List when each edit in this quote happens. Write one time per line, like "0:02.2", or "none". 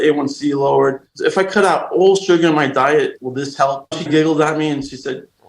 0:01.1
0:03.9

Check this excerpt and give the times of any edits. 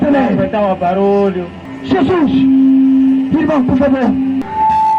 0:01.5

